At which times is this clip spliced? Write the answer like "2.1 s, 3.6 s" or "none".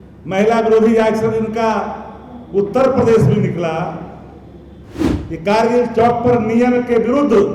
4.9 s